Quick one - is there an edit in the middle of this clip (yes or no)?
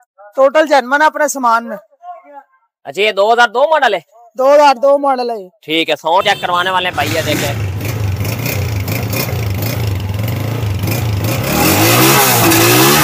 no